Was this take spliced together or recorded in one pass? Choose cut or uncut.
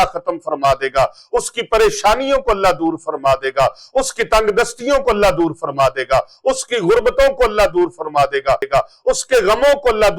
cut